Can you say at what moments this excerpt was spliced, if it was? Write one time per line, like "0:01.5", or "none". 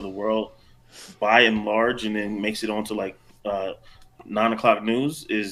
none